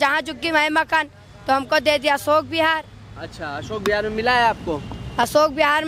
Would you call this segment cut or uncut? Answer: uncut